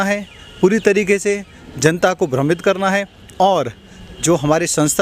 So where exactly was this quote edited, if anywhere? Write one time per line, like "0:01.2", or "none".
none